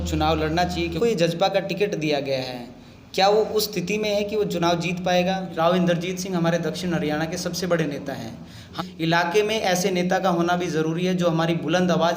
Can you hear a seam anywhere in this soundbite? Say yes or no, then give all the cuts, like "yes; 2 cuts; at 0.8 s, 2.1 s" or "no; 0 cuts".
yes; 3 cuts; at 1.0 s, 5.5 s, 8.7 s